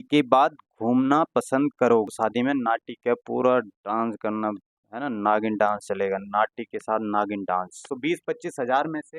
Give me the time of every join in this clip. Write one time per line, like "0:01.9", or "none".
0:02.1
0:07.9

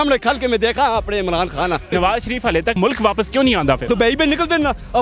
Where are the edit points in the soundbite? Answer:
0:01.8
0:03.9

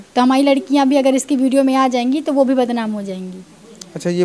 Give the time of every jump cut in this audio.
none

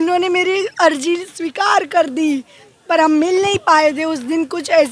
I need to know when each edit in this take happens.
none

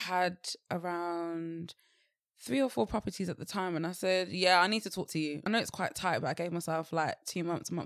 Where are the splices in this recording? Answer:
0:05.5

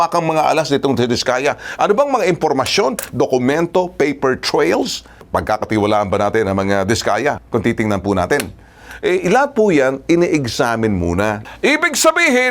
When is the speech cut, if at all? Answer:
0:11.5

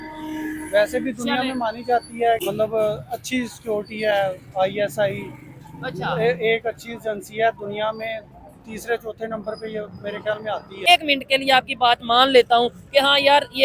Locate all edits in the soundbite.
0:02.4
0:10.8

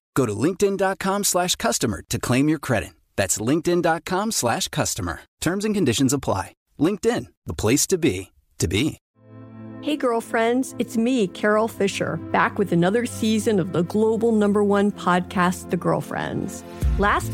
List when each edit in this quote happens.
0:09.0

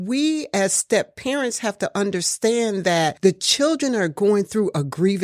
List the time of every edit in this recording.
none

